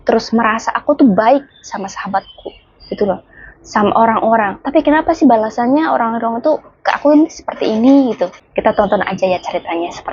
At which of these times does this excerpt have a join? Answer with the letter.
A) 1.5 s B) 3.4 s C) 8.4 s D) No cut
C